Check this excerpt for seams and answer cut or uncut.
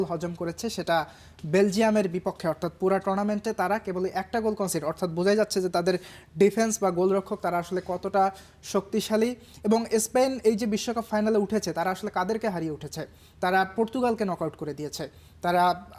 uncut